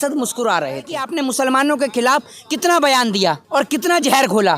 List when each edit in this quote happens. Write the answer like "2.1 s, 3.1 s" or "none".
1.0 s, 3.4 s